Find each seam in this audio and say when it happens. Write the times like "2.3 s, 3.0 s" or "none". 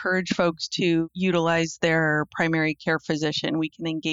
1.0 s